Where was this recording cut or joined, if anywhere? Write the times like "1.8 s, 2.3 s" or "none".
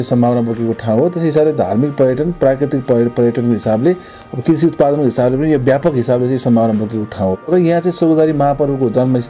7.4 s